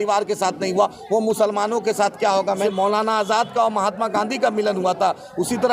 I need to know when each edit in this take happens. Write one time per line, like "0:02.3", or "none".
0:02.6

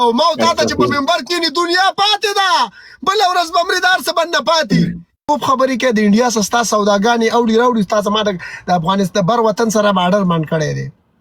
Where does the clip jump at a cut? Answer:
0:05.3

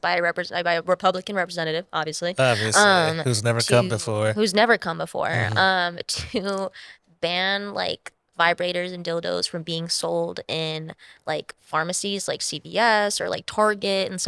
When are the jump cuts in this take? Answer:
none

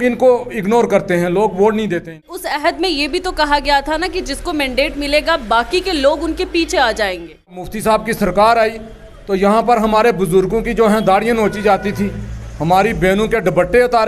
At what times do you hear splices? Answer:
0:02.5
0:07.7

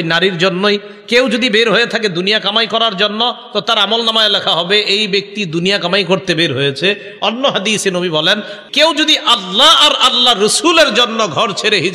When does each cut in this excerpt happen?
0:08.5

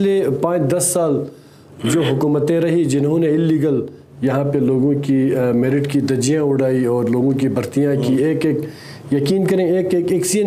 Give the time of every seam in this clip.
none

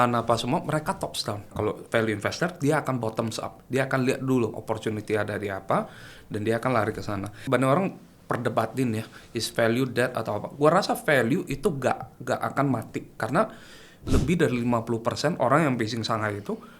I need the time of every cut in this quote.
0:01.5
0:07.4
0:14.1

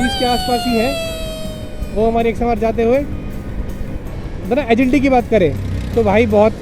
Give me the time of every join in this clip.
none

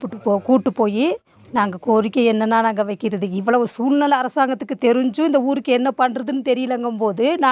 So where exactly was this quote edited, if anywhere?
0:01.3

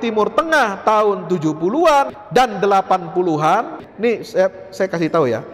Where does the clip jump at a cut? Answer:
0:02.2
0:03.8

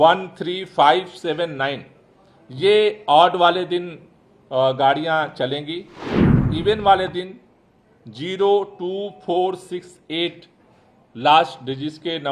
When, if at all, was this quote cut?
0:06.4

